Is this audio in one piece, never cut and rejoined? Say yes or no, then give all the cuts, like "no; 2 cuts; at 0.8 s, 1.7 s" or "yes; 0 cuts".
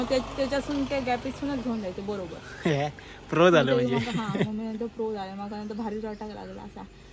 yes; 0 cuts